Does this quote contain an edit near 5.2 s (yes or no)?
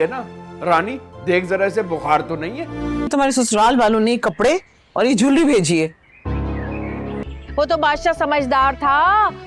no